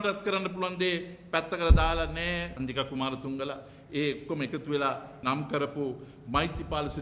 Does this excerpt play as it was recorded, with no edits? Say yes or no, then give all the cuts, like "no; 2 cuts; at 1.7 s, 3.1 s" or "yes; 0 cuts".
no; 2 cuts; at 2.5 s, 5.2 s